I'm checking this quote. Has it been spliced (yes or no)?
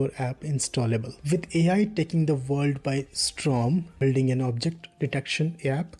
yes